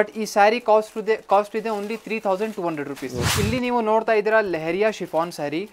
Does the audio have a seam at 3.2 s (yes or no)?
yes